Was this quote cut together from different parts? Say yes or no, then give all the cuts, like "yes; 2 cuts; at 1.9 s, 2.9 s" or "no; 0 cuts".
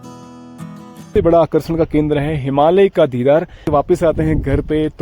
yes; 2 cuts; at 1.1 s, 3.7 s